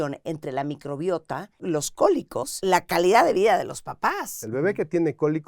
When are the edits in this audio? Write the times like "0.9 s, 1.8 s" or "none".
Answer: 1.5 s, 2.6 s, 4.4 s

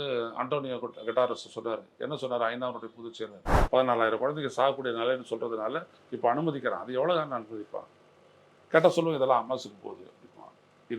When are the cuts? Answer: 3.5 s

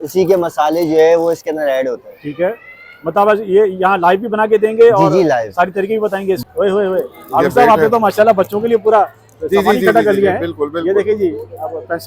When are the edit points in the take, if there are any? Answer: 6.4 s

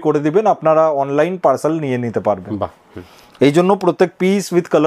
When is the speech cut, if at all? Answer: none

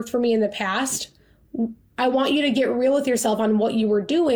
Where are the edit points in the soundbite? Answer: none

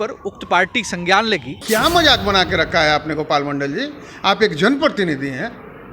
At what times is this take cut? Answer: 1.6 s

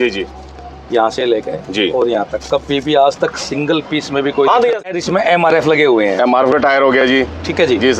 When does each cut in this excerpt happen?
4.8 s

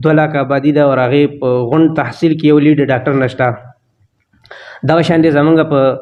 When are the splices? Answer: none

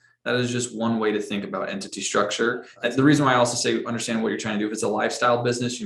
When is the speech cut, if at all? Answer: 2.7 s

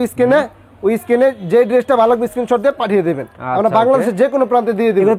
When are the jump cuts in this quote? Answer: none

